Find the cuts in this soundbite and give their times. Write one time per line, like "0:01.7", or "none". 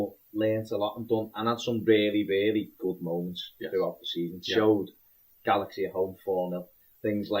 0:03.9

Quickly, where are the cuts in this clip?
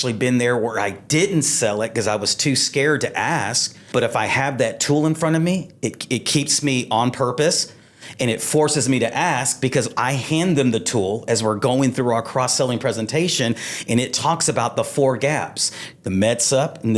0:03.7

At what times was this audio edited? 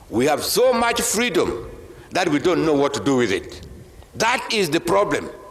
none

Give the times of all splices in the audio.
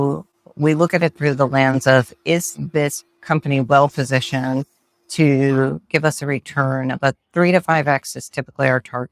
none

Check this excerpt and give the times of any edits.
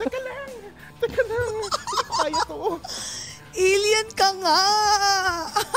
none

